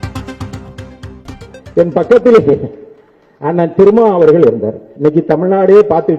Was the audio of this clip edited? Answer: yes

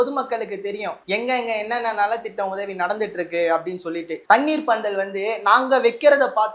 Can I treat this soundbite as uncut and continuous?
yes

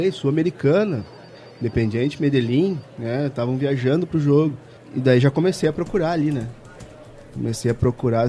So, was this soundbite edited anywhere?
no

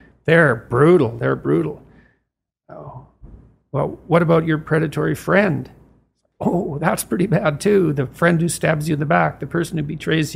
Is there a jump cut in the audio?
no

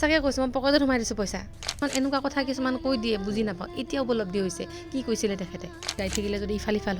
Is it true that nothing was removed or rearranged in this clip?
no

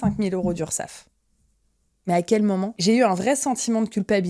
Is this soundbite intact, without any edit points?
no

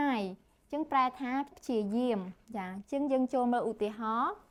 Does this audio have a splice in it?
no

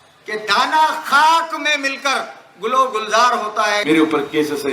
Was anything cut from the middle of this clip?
yes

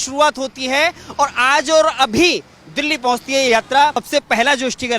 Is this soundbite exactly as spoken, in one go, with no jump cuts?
no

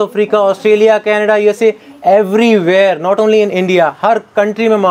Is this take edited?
no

